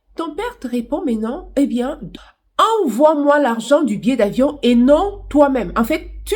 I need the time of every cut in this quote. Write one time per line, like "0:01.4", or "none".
0:02.1